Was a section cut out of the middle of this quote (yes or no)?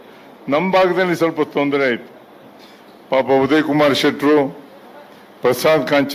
no